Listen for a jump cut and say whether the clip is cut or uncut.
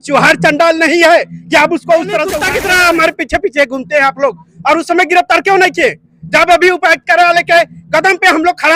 cut